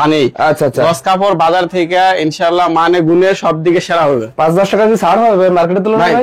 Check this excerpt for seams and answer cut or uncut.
uncut